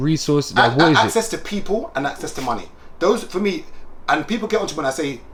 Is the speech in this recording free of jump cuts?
yes; 0 cuts

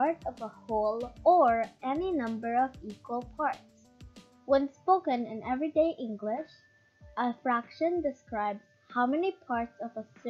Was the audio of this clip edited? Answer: no; 0 cuts

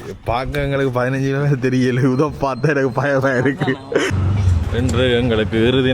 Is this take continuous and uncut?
no; 1 cut; at 4.1 s

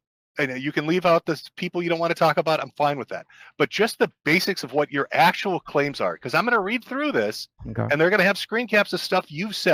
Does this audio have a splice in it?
no; 0 cuts

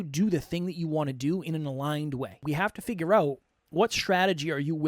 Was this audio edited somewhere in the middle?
yes; 1 cut; at 2.4 s

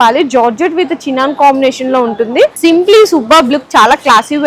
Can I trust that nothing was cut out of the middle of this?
no; 1 cut; at 2.6 s

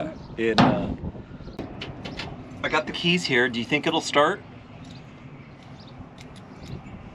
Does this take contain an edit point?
yes; 1 cut; at 1.6 s

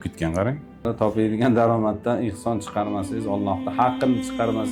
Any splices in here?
yes; 1 cut; at 0.9 s

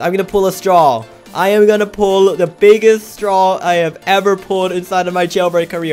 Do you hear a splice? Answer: no; 0 cuts

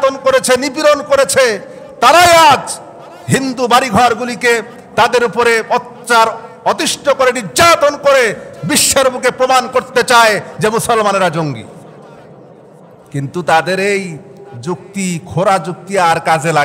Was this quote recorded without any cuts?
yes; 0 cuts

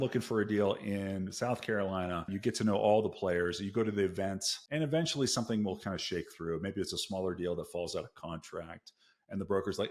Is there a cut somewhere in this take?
yes; 2 cuts; at 2.3 s, 4.5 s

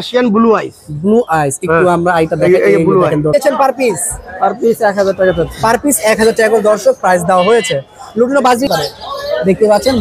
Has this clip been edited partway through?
yes; 2 cuts; at 3.3 s, 8.7 s

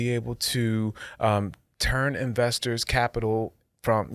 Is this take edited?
no; 0 cuts

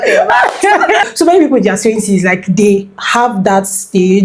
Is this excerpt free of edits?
no; 1 cut; at 1.0 s

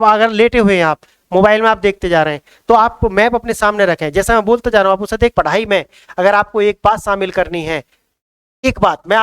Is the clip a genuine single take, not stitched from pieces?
no; 1 cut; at 5.3 s

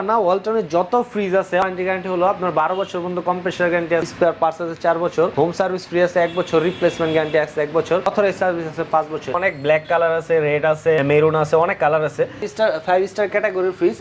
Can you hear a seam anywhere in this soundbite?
yes; 7 cuts; at 1.6 s, 4.0 s, 5.3 s, 8.1 s, 9.4 s, 11.0 s, 12.5 s

